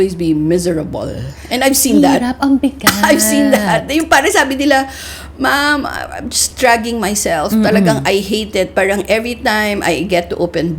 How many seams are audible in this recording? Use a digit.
0